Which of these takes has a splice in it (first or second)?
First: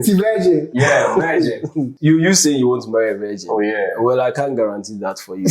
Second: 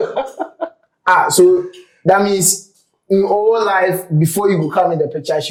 first